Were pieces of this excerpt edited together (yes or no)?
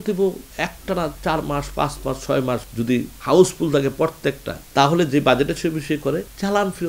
no